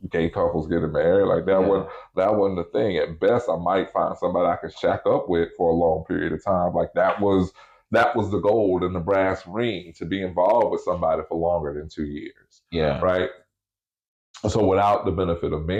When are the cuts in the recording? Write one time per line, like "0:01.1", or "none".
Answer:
none